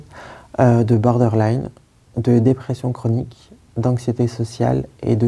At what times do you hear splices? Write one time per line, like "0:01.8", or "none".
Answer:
none